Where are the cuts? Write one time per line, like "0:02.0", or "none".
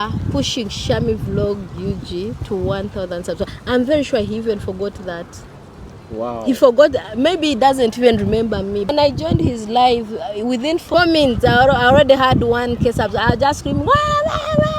0:08.9
0:10.8